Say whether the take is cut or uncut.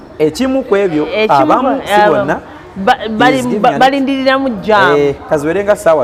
uncut